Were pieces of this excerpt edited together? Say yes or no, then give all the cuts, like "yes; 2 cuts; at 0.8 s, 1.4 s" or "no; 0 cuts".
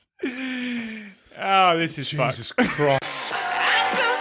yes; 1 cut; at 3.0 s